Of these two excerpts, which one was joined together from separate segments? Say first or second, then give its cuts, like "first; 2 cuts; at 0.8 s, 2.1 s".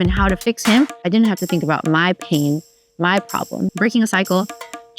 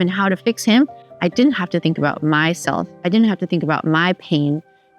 first; 2 cuts; at 1.0 s, 3.7 s